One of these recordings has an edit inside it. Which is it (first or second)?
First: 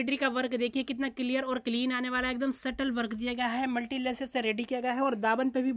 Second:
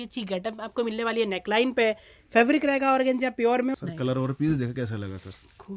second